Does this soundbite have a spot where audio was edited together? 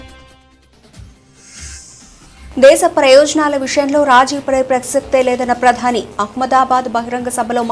yes; 1 cut; at 2.5 s

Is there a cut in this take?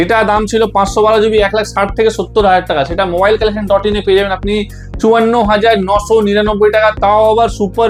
no; 0 cuts

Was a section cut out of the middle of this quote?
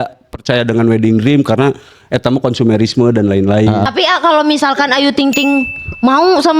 yes; 1 cut; at 3.9 s

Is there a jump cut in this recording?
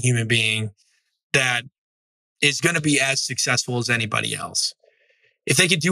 no; 0 cuts

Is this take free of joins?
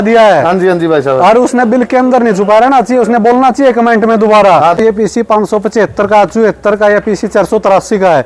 no; 1 cut; at 4.8 s

